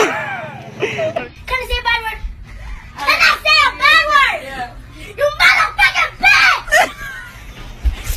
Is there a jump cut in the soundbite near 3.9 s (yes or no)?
no